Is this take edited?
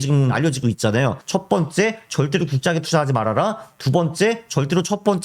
no; 0 cuts

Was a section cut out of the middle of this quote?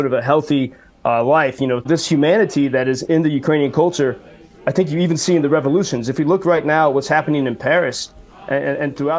yes; 1 cut; at 1.8 s

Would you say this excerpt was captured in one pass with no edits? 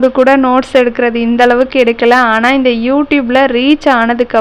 yes; 0 cuts

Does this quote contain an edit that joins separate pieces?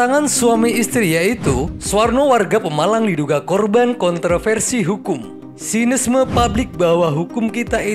yes; 1 cut; at 1.7 s

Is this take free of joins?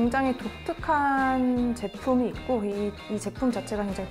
yes; 0 cuts

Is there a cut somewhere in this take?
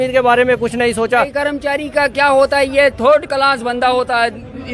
yes; 1 cut; at 1.3 s

